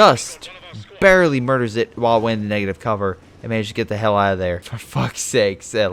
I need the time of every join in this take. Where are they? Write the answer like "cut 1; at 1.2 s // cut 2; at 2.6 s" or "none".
cut 1; at 4.8 s